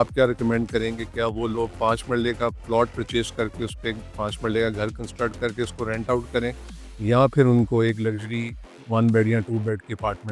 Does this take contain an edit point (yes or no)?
no